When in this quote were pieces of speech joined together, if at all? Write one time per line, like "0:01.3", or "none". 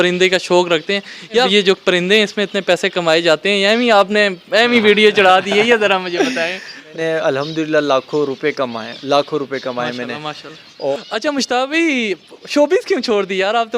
0:01.5
0:06.9
0:10.9